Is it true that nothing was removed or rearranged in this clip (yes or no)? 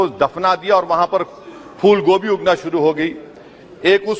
yes